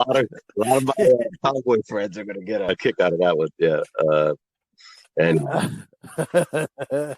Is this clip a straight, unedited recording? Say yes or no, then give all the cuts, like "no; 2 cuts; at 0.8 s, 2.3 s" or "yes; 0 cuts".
no; 1 cut; at 2.7 s